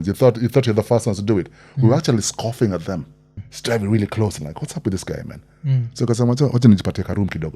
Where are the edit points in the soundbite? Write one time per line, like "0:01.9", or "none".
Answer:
0:03.5